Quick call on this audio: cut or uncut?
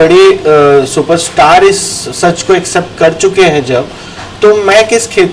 uncut